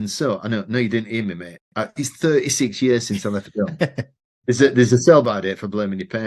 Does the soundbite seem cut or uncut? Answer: uncut